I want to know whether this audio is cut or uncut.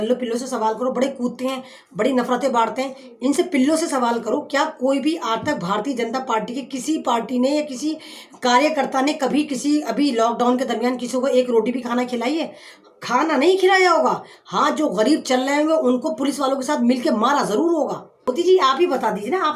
cut